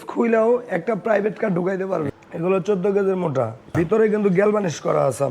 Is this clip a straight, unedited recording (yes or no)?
no